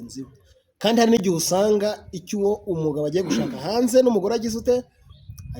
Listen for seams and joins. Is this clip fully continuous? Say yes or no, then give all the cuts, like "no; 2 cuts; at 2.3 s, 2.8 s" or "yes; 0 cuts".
yes; 0 cuts